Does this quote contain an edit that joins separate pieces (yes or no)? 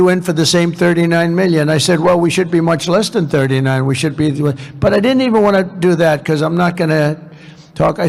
no